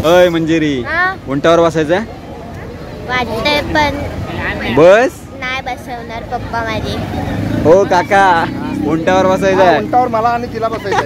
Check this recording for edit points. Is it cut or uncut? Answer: uncut